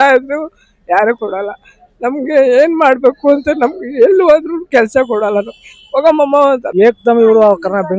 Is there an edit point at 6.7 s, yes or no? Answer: yes